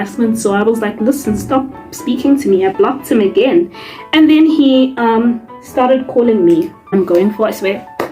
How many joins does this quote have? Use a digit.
1